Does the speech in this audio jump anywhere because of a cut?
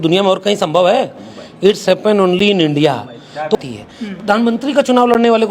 yes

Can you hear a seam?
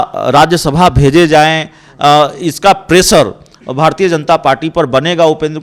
no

